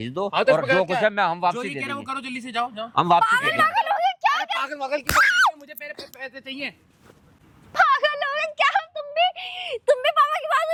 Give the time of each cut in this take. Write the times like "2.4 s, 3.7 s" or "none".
none